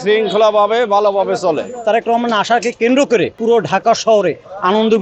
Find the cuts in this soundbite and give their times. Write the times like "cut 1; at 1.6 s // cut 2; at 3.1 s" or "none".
cut 1; at 1.8 s // cut 2; at 3.4 s